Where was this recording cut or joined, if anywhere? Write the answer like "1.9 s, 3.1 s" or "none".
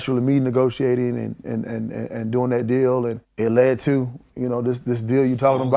3.2 s